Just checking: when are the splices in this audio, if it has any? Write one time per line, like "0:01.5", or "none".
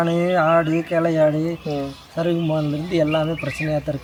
none